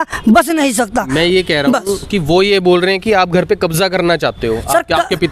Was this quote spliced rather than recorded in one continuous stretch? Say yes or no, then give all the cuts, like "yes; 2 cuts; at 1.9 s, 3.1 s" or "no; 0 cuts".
no; 0 cuts